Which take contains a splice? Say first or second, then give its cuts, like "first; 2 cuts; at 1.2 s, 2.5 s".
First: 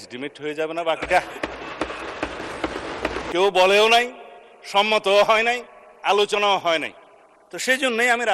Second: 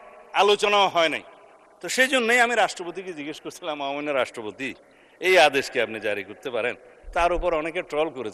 first; 1 cut; at 3.3 s